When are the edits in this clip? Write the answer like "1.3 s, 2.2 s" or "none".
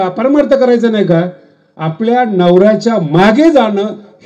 none